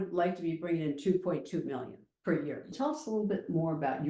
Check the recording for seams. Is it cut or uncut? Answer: cut